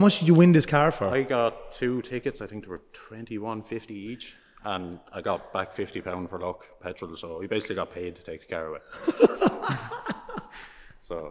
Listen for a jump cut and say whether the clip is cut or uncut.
uncut